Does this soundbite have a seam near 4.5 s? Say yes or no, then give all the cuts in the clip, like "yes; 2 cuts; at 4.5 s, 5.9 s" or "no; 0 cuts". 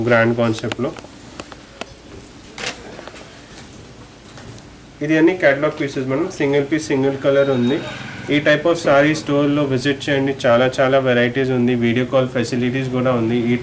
no; 0 cuts